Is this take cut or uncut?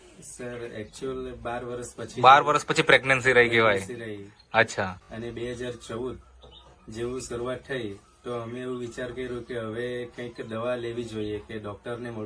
cut